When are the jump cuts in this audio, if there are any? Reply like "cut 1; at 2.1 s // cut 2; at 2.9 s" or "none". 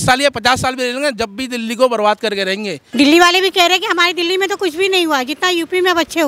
cut 1; at 2.8 s